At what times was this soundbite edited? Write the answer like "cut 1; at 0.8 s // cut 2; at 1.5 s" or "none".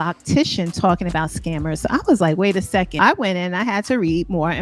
cut 1; at 3.0 s

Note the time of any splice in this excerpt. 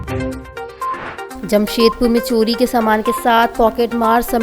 cut 1; at 1.3 s

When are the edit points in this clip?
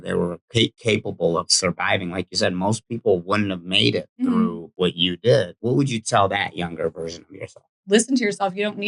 cut 1; at 4.7 s // cut 2; at 5.5 s // cut 3; at 7.8 s

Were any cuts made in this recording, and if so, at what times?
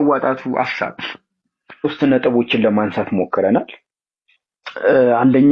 cut 1; at 1.8 s

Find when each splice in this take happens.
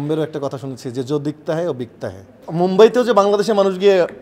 cut 1; at 2.4 s

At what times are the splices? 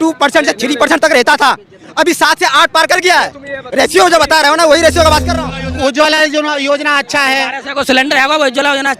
cut 1; at 5.3 s

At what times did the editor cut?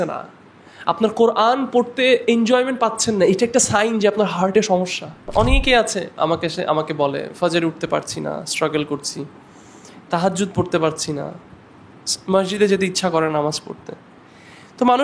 cut 1; at 5.3 s

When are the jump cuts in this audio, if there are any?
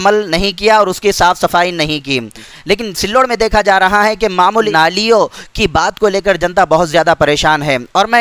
cut 1; at 2.7 s // cut 2; at 4.7 s

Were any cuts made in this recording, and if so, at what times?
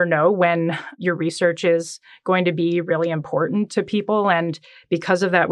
cut 1; at 1.0 s

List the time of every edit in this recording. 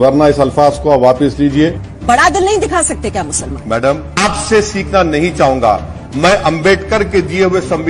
cut 1; at 1.8 s // cut 2; at 4.1 s

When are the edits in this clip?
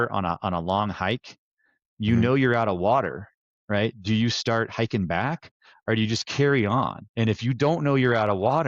cut 1; at 7.0 s

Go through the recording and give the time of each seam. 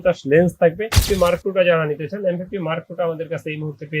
cut 1; at 0.9 s

